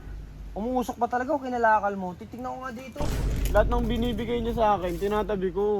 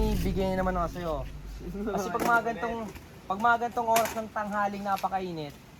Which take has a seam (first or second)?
first